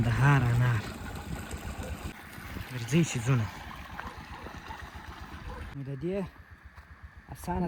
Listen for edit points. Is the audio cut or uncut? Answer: uncut